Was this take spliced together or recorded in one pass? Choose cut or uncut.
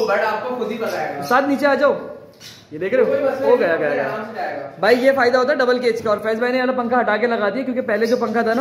uncut